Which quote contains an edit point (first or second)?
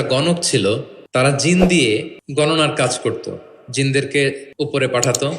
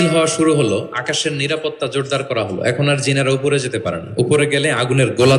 first